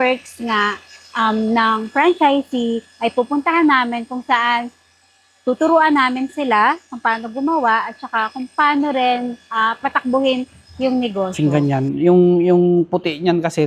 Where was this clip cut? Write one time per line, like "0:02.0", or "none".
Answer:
0:11.3